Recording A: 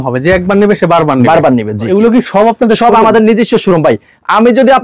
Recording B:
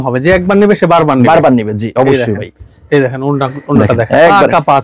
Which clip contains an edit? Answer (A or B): A